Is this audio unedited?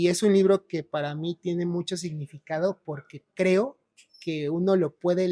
yes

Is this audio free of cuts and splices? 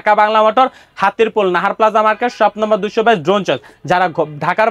yes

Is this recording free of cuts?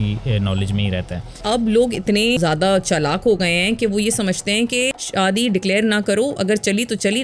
no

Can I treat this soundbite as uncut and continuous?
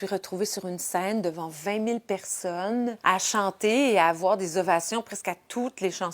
no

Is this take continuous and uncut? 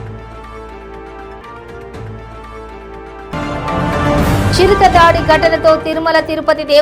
no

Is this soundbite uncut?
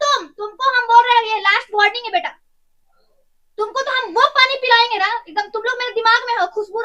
yes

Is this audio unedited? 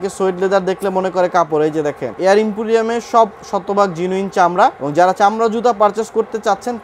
no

